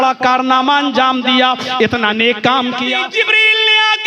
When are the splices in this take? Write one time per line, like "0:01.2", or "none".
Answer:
0:02.9